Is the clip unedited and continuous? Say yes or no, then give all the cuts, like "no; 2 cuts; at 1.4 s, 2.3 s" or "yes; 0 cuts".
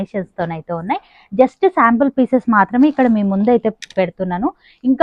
yes; 0 cuts